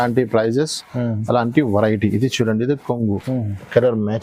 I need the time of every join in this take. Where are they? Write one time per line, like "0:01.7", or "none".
0:03.2